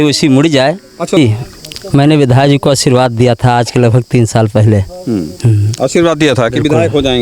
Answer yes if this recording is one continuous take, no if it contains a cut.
no